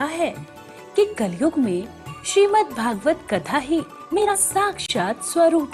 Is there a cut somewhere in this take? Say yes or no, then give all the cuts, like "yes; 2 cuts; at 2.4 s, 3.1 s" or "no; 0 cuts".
yes; 1 cut; at 4.4 s